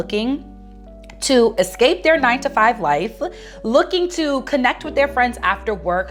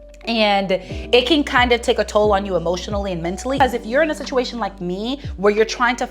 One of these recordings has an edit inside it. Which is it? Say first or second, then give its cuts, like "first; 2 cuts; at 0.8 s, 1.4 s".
second; 1 cut; at 3.6 s